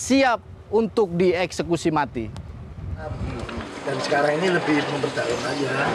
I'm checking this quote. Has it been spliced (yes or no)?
no